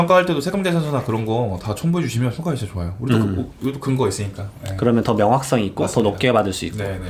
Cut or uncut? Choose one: uncut